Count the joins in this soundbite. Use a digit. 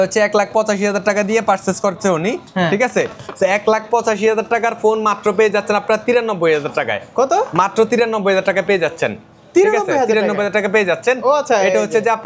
0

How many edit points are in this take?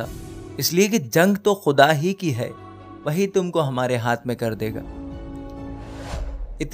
0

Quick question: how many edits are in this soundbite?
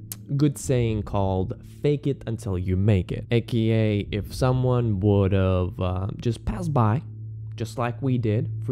1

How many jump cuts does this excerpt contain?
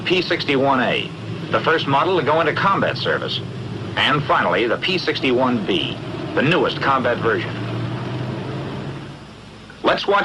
1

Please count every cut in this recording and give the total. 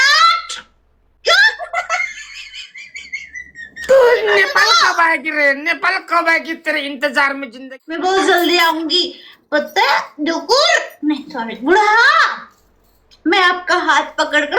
1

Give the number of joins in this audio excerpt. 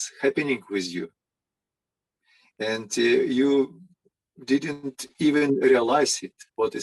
0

